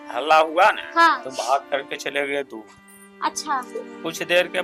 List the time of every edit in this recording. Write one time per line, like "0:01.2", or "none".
none